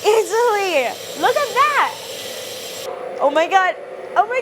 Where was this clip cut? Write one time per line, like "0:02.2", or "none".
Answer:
0:02.8